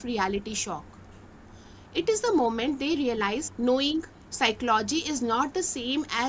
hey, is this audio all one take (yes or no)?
no